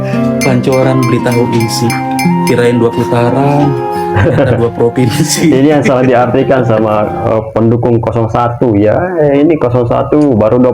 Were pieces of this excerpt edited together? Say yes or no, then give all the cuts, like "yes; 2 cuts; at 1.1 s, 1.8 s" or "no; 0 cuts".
no; 0 cuts